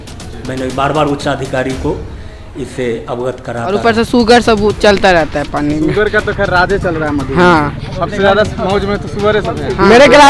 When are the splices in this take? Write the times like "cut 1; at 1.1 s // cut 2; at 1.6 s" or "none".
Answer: cut 1; at 3.8 s